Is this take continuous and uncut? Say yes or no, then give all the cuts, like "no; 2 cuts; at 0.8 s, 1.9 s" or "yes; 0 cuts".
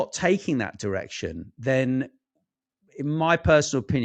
yes; 0 cuts